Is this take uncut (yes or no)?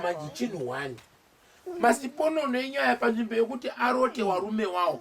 yes